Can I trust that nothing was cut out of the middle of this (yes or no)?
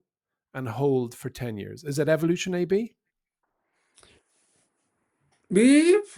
yes